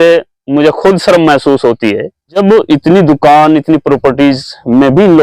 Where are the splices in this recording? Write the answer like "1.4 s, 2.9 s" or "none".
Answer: 2.4 s